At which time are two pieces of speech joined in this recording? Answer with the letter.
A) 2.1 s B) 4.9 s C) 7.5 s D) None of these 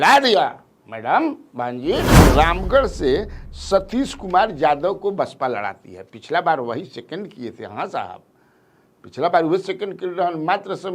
A